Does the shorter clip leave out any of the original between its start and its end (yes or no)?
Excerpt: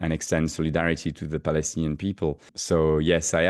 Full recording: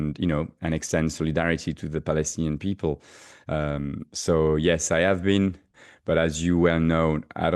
yes